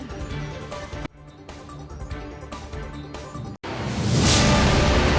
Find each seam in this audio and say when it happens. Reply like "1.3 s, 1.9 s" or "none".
3.6 s

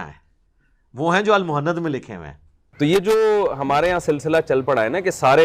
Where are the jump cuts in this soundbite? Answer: 2.6 s

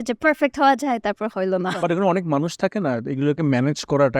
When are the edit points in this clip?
1.8 s

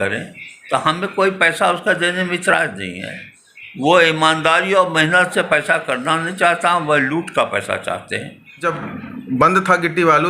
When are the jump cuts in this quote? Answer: 8.6 s

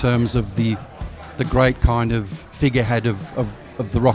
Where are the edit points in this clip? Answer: none

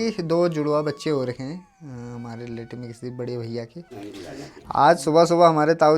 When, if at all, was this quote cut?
4.0 s

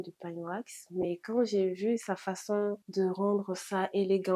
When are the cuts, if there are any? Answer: 2.8 s

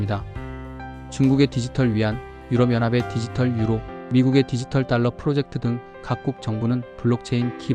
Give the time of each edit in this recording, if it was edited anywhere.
none

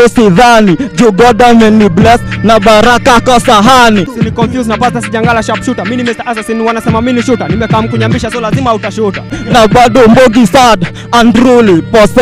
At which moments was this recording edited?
4.1 s, 9.4 s

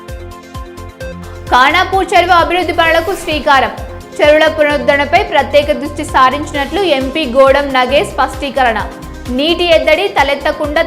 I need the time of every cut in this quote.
0.9 s

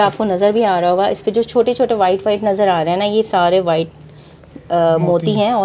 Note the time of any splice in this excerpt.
none

